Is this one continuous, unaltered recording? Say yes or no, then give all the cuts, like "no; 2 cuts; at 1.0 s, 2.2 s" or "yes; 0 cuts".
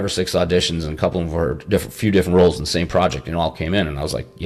yes; 0 cuts